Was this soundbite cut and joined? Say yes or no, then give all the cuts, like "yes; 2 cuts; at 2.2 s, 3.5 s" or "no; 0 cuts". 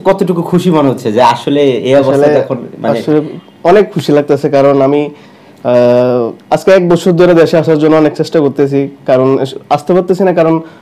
no; 0 cuts